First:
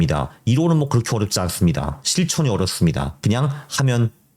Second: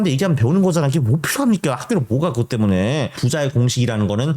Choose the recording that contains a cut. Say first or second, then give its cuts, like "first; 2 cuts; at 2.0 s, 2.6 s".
second; 1 cut; at 3.2 s